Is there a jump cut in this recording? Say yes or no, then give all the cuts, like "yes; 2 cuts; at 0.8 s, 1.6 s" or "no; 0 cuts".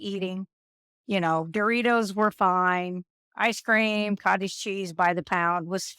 no; 0 cuts